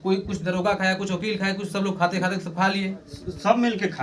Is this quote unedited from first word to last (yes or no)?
yes